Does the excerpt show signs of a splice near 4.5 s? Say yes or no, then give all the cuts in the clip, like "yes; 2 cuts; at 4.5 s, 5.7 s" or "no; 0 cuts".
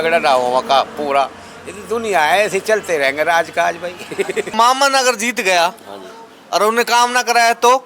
yes; 1 cut; at 4.5 s